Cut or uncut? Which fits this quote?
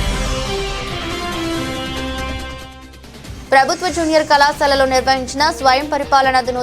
uncut